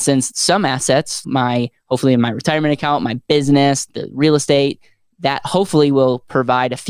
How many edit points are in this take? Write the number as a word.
one